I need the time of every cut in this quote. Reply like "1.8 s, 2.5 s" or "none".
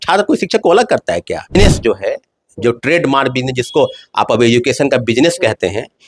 1.5 s